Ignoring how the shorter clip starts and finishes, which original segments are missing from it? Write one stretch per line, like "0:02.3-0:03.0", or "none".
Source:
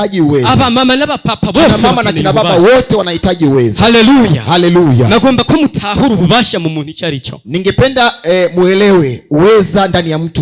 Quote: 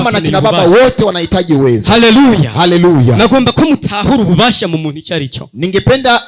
none